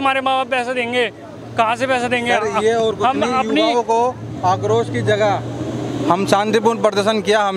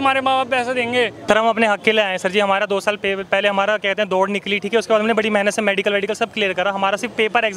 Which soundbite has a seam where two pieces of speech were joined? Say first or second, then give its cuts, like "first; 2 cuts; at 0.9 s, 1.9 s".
second; 1 cut; at 1.2 s